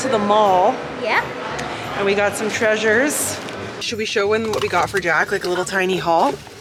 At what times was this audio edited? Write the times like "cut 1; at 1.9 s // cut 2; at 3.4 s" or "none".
none